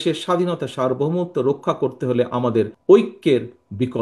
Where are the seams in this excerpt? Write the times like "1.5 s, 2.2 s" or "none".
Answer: 2.8 s

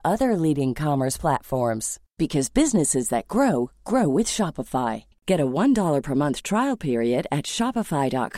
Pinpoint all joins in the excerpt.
none

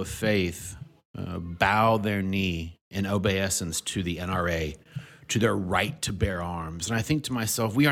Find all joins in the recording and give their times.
none

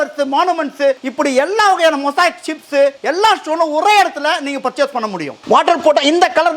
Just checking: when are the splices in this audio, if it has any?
1.1 s, 3.0 s, 5.3 s

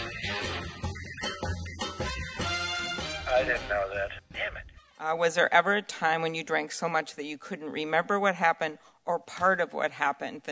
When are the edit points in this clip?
5.1 s

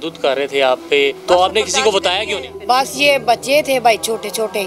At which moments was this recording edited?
1.2 s, 2.5 s

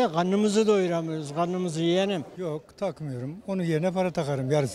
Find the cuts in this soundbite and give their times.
none

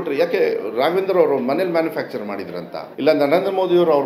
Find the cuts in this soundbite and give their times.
2.8 s

